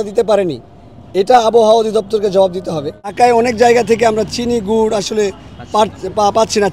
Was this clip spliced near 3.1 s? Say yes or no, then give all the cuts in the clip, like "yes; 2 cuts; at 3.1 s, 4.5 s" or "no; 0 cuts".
yes; 1 cut; at 3.1 s